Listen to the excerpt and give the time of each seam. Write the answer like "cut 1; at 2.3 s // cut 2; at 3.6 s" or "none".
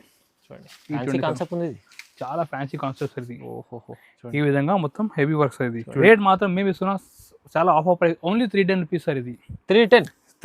cut 1; at 6.0 s

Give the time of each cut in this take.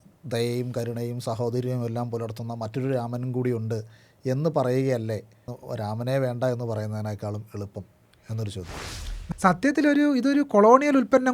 cut 1; at 5.6 s // cut 2; at 9.3 s

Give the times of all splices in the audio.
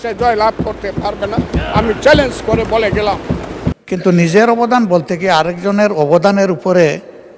cut 1; at 3.8 s

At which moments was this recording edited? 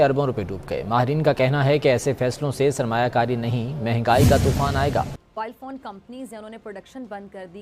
cut 1; at 5.1 s

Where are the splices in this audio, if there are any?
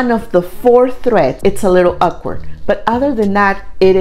cut 1; at 1.4 s

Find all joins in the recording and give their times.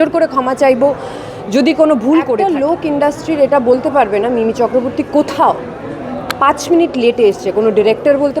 cut 1; at 2.8 s

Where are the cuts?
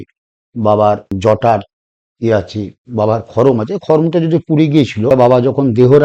cut 1; at 1.1 s // cut 2; at 5.1 s

